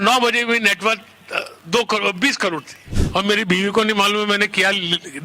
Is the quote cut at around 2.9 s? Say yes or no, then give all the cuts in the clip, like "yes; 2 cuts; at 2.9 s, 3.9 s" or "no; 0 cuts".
yes; 1 cut; at 2.9 s